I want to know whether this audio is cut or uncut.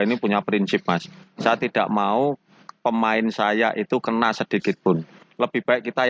uncut